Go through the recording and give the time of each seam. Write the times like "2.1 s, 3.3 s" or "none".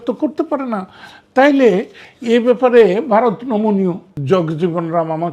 4.1 s